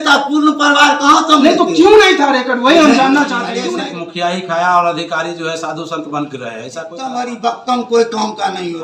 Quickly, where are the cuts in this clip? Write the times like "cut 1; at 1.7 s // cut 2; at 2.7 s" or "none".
cut 1; at 3.5 s // cut 2; at 7.2 s